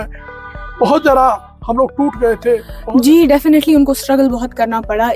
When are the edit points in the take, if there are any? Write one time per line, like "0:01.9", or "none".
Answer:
0:02.7